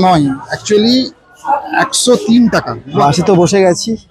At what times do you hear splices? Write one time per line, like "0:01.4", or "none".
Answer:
0:03.0